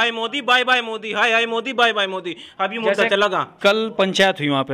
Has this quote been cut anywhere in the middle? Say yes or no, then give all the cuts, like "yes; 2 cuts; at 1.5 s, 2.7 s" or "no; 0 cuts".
no; 0 cuts